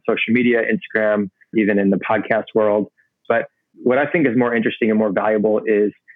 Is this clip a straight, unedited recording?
no; 2 cuts; at 1.5 s, 3.6 s

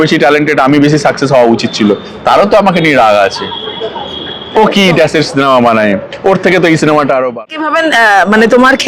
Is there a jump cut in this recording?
yes; 1 cut; at 7.4 s

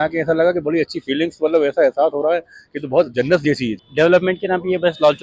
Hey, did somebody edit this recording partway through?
yes; 1 cut; at 3.8 s

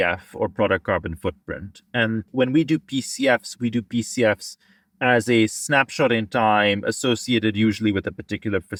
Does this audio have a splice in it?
no; 0 cuts

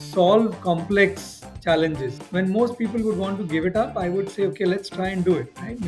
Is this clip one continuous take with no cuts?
no; 1 cut; at 2.1 s

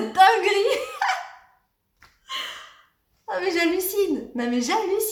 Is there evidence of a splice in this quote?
no; 0 cuts

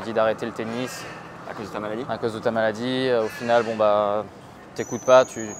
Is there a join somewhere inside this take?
no; 0 cuts

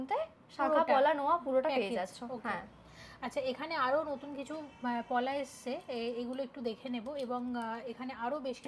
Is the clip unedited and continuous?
yes; 0 cuts

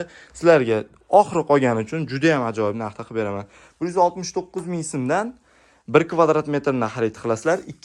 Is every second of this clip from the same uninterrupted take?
yes; 0 cuts

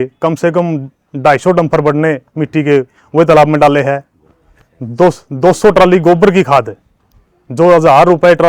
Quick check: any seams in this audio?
no; 0 cuts

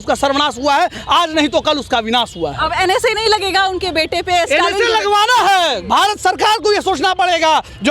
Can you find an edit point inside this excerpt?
no; 0 cuts

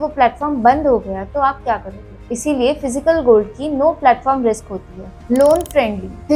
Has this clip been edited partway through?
no; 0 cuts

